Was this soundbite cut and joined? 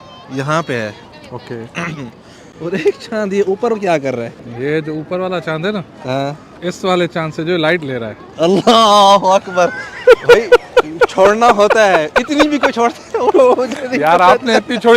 no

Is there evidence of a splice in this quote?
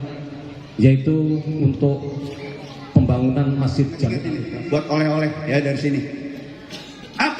yes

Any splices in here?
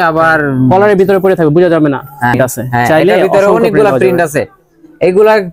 yes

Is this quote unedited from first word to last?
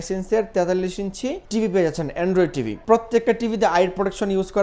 no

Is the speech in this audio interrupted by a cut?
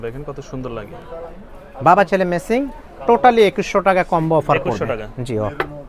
no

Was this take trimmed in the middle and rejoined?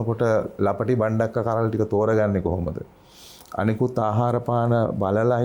no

